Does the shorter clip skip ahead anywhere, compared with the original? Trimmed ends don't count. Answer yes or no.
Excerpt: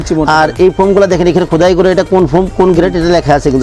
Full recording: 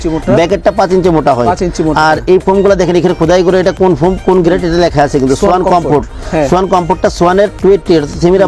no